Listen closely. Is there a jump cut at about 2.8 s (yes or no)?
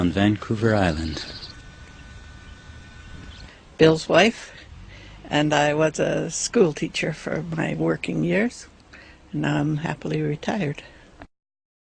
no